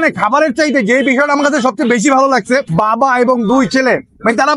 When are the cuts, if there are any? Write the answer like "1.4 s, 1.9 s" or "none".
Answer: none